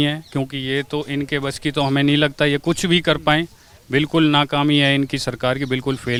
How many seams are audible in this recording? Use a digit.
0